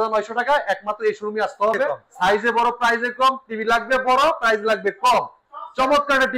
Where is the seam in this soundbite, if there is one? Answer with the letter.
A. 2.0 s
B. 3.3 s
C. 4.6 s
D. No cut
A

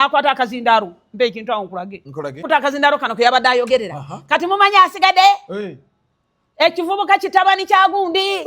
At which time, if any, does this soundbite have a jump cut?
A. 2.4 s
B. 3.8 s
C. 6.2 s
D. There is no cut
A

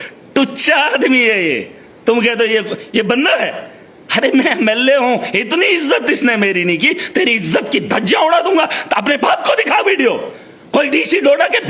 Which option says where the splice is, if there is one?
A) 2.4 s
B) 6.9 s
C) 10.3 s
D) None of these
D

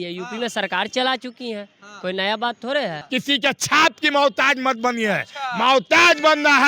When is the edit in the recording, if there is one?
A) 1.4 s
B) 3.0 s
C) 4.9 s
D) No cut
B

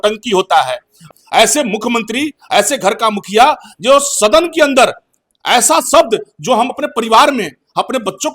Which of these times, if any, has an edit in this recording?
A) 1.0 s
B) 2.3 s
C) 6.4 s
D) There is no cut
A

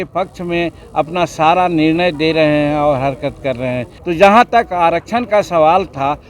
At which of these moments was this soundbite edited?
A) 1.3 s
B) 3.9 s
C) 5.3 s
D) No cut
B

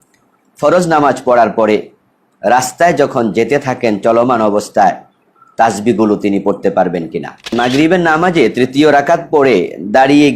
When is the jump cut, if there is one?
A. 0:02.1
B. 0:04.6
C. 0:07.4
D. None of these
C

